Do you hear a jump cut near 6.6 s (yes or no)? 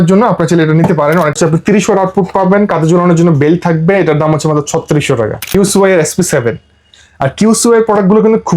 no